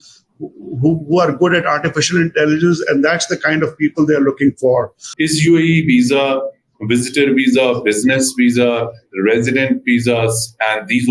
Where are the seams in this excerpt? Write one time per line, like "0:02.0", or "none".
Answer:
0:05.0